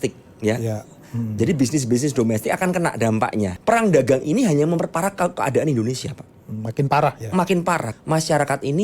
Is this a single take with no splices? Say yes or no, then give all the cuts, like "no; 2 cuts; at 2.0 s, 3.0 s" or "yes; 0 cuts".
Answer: no; 2 cuts; at 3.6 s, 7.9 s